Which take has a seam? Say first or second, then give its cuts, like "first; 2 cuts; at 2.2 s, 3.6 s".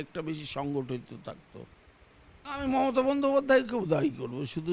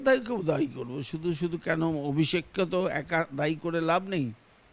first; 1 cut; at 2.4 s